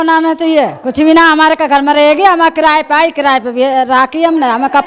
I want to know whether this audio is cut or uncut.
uncut